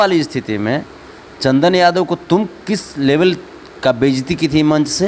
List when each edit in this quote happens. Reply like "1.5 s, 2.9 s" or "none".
none